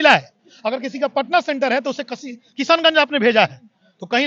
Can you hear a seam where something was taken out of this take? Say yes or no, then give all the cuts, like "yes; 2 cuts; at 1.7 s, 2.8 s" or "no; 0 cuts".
no; 0 cuts